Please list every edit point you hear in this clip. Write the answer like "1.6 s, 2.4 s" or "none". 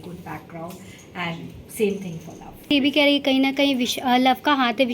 2.7 s